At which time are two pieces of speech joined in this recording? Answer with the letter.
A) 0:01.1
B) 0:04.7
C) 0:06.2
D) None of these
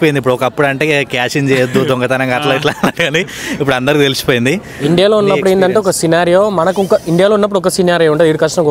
B